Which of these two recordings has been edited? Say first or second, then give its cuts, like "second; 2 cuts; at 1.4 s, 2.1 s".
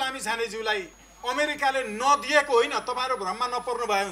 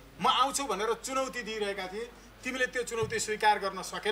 first; 1 cut; at 1.0 s